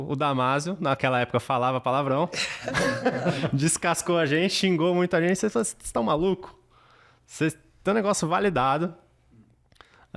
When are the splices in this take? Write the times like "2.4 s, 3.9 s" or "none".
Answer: none